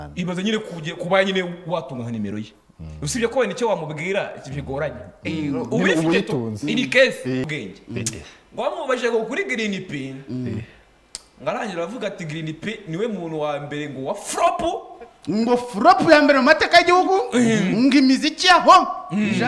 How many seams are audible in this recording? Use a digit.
1